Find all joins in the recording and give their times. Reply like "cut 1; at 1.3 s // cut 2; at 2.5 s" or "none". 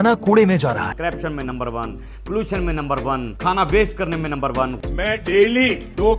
cut 1; at 0.9 s // cut 2; at 3.3 s // cut 3; at 4.8 s